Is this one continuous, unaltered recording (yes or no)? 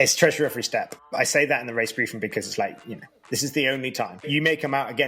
no